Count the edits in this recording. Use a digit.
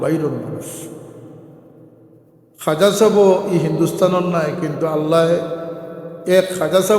0